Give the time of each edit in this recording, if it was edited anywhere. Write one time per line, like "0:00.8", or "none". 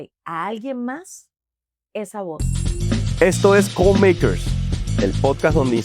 0:02.4